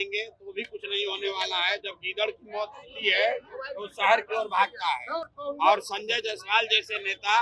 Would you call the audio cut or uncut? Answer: uncut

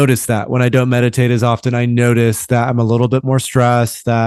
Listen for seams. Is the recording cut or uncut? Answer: uncut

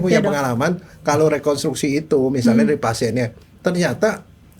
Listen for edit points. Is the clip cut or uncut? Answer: uncut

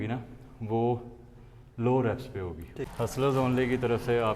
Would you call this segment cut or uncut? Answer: cut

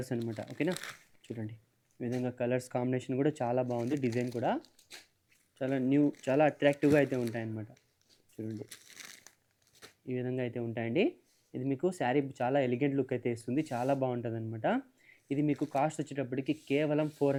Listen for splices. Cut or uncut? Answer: uncut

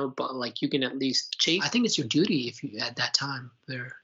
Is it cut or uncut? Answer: cut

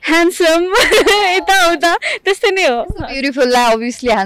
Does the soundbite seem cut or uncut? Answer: uncut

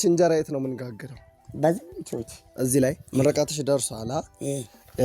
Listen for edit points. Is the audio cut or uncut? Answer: uncut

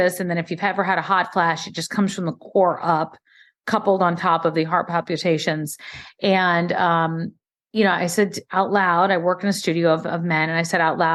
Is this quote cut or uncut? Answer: uncut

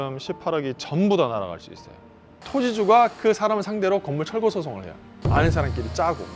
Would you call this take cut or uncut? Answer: cut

